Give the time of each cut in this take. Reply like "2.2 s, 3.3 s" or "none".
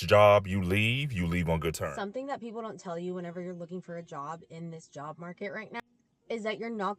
2.3 s